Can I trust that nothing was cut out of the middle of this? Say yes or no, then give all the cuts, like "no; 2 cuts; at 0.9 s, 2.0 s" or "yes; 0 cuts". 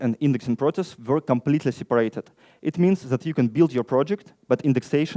yes; 0 cuts